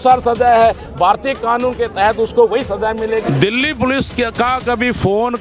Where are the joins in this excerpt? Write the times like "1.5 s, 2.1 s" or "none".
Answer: 3.2 s